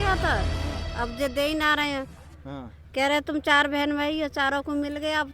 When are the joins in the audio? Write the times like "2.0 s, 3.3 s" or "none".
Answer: none